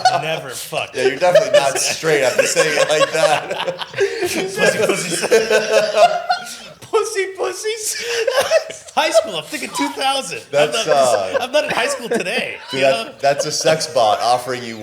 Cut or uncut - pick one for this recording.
cut